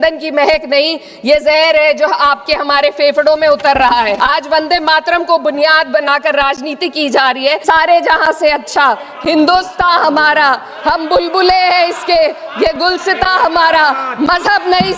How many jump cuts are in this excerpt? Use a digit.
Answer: 2